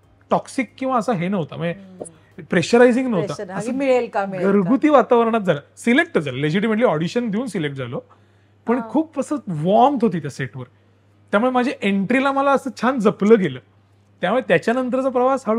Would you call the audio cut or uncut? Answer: uncut